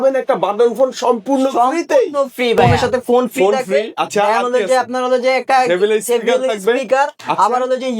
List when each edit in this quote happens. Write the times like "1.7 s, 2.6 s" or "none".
2.7 s